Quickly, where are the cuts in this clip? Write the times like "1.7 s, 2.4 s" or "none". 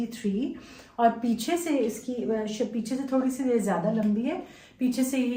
none

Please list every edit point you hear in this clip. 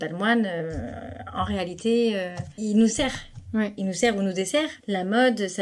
2.4 s, 4.8 s

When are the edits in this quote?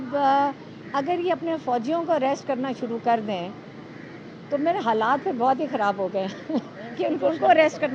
none

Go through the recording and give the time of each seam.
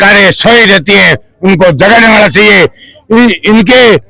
none

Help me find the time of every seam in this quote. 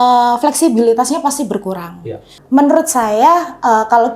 2.3 s

